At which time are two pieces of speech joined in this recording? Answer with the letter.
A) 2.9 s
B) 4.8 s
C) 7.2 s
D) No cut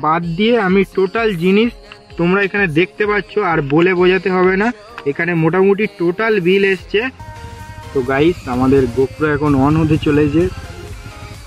C